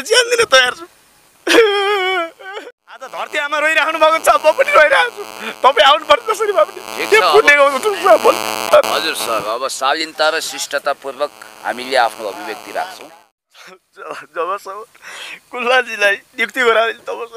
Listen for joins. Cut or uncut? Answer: cut